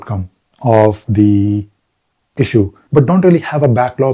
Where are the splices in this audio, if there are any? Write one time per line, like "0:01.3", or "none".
0:02.8